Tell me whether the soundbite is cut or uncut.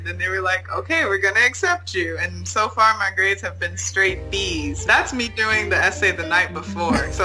cut